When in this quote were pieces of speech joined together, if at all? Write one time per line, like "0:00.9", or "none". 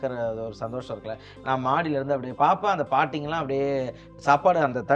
0:02.3